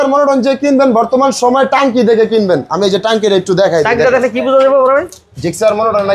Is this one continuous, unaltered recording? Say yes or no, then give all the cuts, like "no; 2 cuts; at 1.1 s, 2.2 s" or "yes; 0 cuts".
yes; 0 cuts